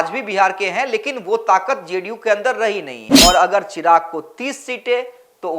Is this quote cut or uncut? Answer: cut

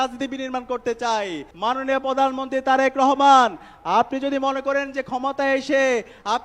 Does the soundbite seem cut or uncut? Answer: cut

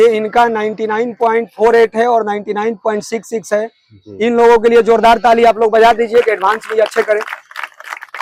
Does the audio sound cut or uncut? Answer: uncut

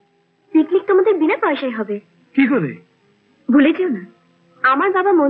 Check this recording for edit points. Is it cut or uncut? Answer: uncut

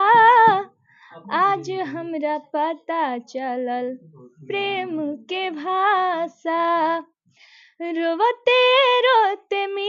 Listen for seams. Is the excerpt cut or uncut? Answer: uncut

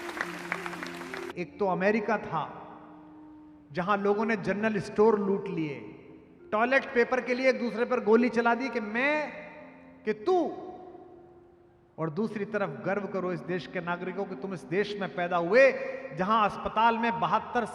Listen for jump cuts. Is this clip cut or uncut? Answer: cut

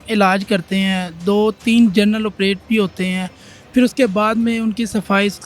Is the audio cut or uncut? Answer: uncut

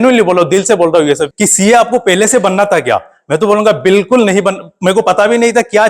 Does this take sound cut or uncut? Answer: cut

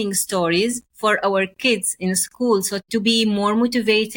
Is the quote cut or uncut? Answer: cut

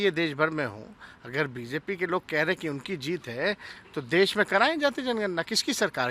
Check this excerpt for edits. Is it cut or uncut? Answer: uncut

